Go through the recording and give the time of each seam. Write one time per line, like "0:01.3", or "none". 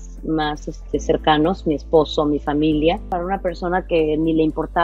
0:03.1